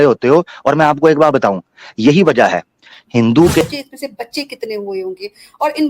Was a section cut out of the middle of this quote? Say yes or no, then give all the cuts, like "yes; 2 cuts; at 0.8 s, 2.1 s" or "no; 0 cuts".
yes; 1 cut; at 3.6 s